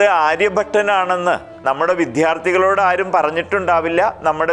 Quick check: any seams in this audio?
yes; 1 cut; at 1.5 s

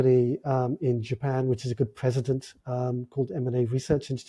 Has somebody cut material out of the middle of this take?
no; 0 cuts

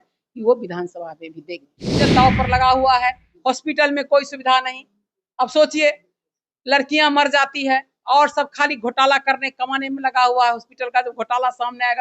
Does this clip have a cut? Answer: yes; 1 cut; at 2.0 s

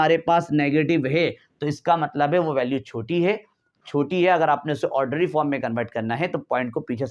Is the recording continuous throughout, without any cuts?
yes; 0 cuts

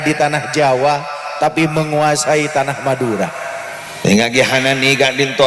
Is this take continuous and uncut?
no; 1 cut; at 3.8 s

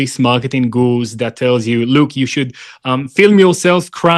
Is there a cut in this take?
no; 0 cuts

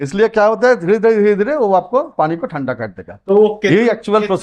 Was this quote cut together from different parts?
no; 0 cuts

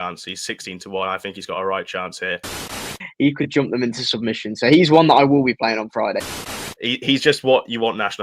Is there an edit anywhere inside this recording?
yes; 2 cuts; at 2.7 s, 6.3 s

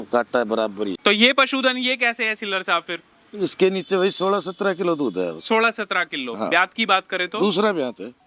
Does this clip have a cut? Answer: yes; 1 cut; at 0.9 s

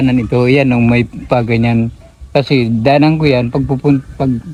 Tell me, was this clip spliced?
no; 0 cuts

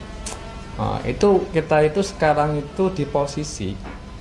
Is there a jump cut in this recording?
no; 0 cuts

